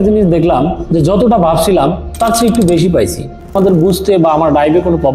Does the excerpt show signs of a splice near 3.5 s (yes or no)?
yes